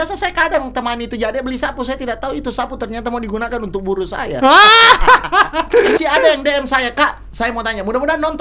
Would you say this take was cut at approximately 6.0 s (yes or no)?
yes